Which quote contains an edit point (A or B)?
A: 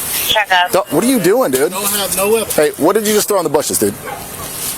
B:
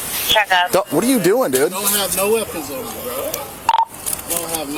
A